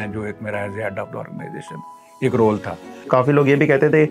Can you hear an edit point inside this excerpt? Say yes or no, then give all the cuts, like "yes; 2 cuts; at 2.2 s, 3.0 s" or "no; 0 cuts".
yes; 1 cut; at 3.1 s